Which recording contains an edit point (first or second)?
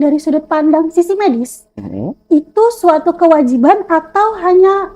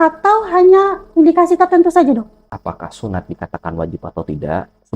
second